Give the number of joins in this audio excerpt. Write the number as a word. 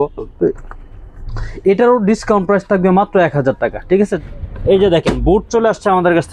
one